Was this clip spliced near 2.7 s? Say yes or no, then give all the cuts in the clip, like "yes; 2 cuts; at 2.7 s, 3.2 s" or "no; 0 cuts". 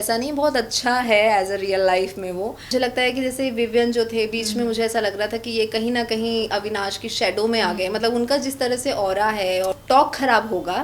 yes; 2 cuts; at 2.7 s, 9.7 s